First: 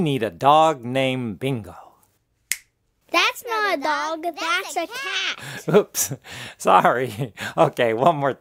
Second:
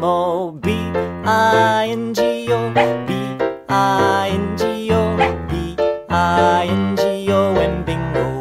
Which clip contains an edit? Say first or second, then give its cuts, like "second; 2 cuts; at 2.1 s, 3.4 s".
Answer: first; 1 cut; at 4.5 s